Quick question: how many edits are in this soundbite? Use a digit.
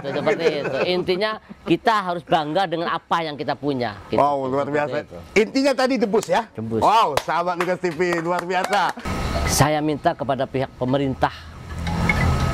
1